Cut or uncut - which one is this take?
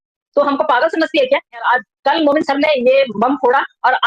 cut